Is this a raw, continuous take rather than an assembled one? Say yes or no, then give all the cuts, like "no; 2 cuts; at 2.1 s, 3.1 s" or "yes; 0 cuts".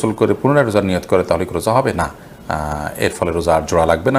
yes; 0 cuts